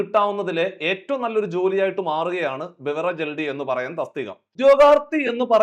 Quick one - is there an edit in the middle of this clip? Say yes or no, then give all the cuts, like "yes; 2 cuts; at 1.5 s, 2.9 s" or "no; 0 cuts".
yes; 1 cut; at 4.6 s